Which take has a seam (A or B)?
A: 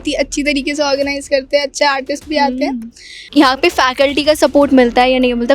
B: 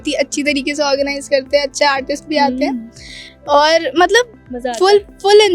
A